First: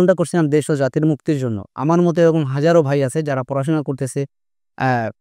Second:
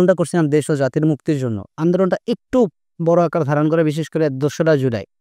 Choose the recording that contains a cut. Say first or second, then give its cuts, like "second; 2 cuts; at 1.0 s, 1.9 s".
second; 1 cut; at 1.7 s